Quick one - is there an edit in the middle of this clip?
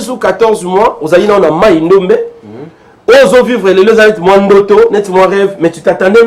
no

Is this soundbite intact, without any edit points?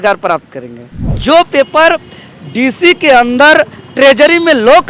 no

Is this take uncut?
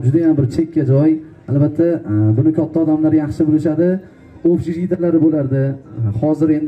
yes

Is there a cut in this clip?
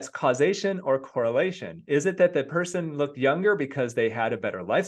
no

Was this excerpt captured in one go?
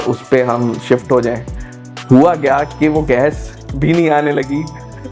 yes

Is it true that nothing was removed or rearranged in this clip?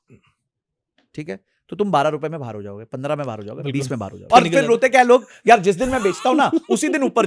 no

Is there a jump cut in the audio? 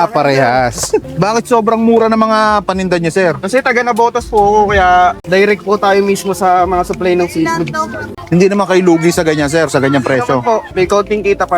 yes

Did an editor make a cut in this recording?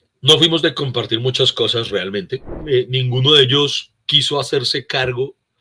yes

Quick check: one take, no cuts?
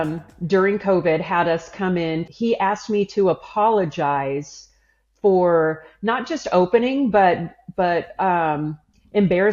no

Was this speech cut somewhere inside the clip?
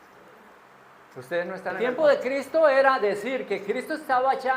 yes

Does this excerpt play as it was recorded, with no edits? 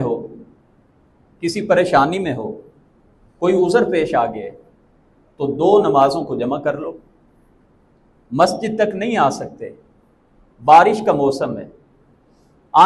yes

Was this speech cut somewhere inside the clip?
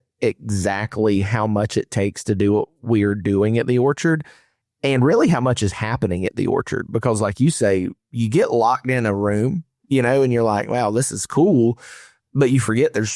no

